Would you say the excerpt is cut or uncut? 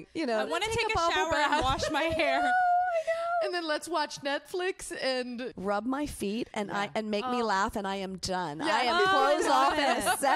cut